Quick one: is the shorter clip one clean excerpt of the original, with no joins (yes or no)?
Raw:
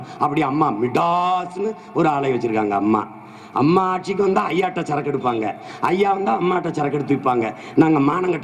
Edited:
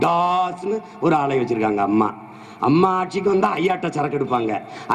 yes